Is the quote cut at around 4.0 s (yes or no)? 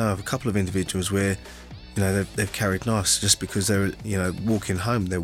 yes